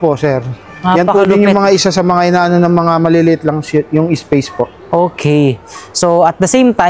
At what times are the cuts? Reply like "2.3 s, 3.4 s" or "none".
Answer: none